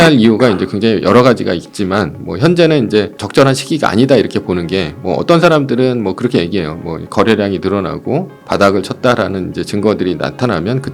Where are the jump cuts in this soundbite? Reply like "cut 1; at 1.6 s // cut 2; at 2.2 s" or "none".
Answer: cut 1; at 3.2 s // cut 2; at 8.3 s